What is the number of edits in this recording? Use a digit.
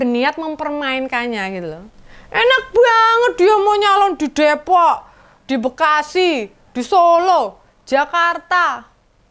1